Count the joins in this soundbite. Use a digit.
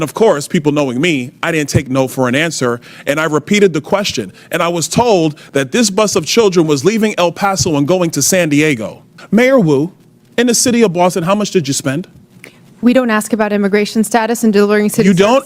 1